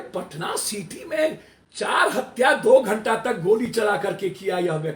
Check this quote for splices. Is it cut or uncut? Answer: uncut